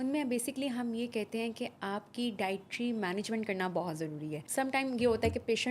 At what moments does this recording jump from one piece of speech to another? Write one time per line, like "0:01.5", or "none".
0:04.4